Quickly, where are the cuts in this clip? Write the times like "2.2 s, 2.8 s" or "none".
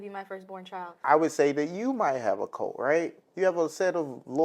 1.0 s